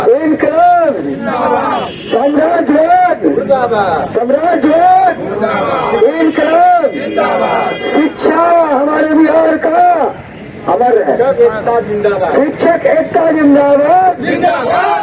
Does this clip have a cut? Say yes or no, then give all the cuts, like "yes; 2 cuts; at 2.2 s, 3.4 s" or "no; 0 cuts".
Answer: no; 0 cuts